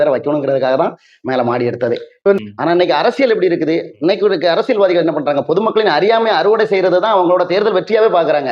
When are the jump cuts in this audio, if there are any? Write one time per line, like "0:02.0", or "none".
0:02.4